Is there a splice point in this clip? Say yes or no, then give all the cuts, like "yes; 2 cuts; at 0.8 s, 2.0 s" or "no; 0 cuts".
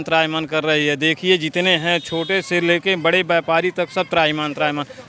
no; 0 cuts